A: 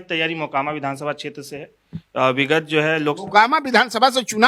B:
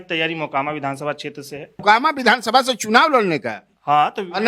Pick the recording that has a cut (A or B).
B